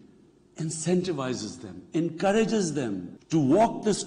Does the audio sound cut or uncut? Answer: cut